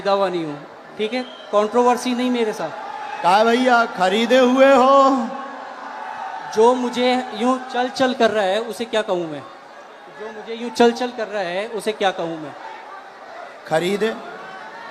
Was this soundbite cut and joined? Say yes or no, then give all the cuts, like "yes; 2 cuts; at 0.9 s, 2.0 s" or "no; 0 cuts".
no; 0 cuts